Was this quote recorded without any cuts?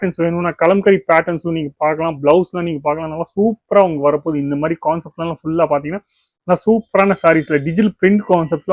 yes; 0 cuts

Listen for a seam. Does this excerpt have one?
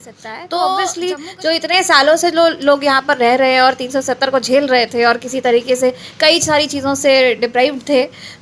yes; 1 cut; at 1.0 s

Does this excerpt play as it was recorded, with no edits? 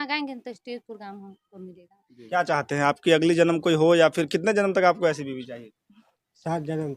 no; 1 cut; at 2.1 s

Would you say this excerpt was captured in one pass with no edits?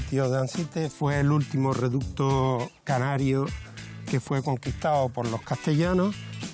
no; 1 cut; at 0.9 s

